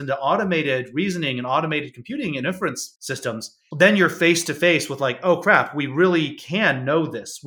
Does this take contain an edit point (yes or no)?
no